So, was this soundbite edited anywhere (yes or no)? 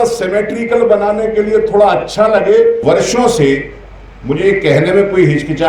yes